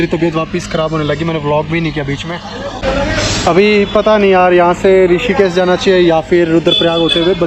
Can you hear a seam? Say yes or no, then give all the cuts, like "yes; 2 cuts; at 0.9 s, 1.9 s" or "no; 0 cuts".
no; 0 cuts